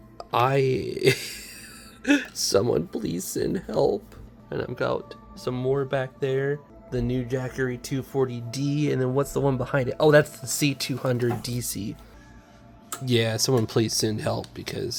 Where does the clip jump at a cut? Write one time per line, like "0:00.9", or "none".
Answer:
none